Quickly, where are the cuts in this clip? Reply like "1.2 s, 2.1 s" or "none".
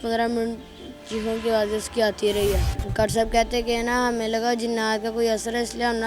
2.8 s

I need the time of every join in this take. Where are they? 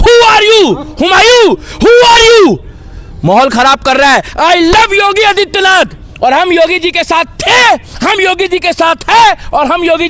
none

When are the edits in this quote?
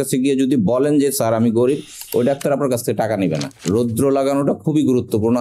3.5 s

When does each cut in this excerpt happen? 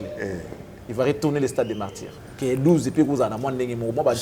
2.0 s

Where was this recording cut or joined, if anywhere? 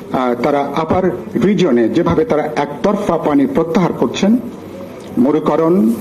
none

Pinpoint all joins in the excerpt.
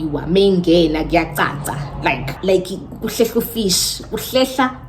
2.3 s

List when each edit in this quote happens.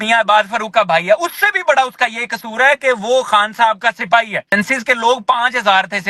4.5 s

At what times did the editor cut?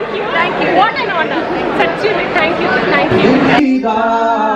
3.1 s

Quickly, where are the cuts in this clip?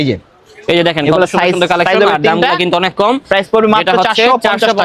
none

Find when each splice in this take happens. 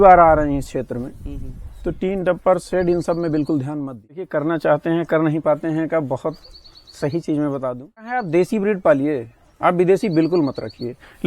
4.3 s, 8.2 s

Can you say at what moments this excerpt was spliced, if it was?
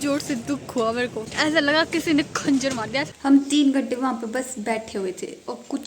1.2 s, 3.1 s

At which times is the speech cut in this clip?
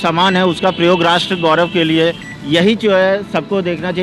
2.3 s

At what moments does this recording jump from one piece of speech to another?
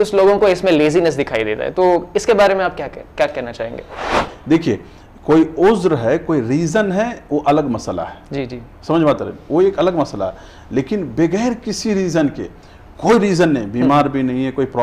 4.3 s

